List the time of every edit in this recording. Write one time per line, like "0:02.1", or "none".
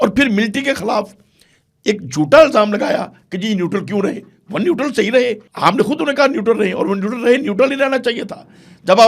0:05.5